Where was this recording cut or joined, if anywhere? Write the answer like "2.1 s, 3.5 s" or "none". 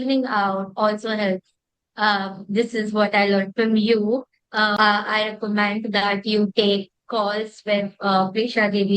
4.7 s